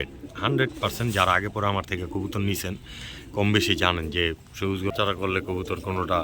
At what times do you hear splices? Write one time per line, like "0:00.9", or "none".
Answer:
0:04.9